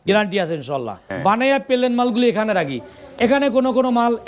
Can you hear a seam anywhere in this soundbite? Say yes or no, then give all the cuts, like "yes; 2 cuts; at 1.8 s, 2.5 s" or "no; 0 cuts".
yes; 1 cut; at 1.0 s